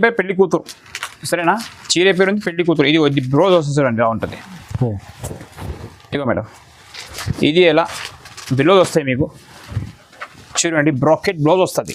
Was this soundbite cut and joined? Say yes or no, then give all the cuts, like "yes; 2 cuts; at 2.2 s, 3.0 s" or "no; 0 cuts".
no; 0 cuts